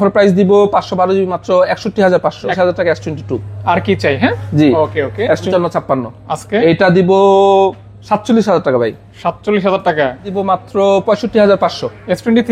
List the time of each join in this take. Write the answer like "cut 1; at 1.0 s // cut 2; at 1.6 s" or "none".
cut 1; at 2.5 s // cut 2; at 5.5 s // cut 3; at 10.3 s